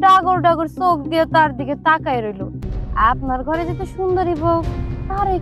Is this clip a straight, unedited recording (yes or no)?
no